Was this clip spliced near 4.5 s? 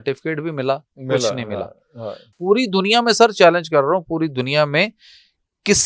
no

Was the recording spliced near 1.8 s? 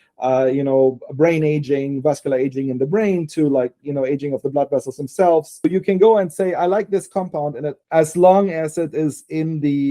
no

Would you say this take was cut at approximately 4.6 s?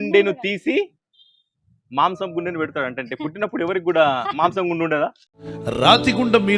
no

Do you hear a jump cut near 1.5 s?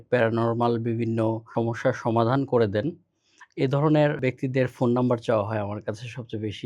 yes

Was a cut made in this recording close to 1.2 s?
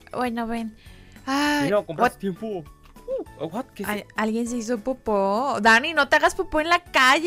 no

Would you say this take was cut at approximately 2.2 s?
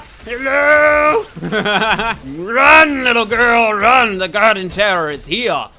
yes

